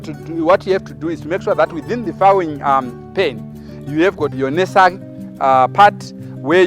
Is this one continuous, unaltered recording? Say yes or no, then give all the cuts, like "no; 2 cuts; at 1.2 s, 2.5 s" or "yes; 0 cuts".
no; 1 cut; at 4.3 s